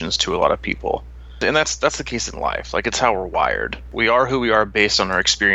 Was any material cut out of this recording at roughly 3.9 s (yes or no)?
yes